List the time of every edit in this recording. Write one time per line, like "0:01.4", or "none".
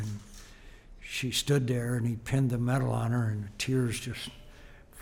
none